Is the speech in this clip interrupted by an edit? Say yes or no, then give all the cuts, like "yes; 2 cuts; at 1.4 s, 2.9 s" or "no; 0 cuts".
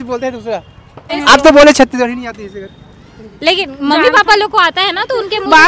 yes; 1 cut; at 1.1 s